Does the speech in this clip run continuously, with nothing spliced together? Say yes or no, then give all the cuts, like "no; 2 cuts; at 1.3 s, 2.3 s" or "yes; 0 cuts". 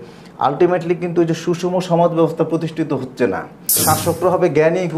no; 1 cut; at 3.8 s